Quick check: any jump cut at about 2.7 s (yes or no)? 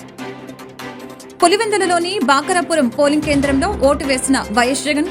no